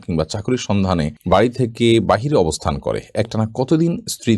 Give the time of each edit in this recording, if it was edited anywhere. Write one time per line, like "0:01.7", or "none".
0:01.2